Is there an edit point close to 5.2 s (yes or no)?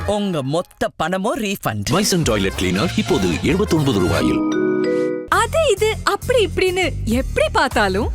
yes